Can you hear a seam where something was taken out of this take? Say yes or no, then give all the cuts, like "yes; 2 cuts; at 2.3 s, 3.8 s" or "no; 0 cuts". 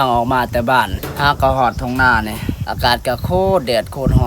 yes; 2 cuts; at 1.0 s, 2.6 s